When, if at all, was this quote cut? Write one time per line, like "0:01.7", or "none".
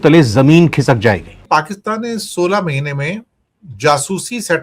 0:01.4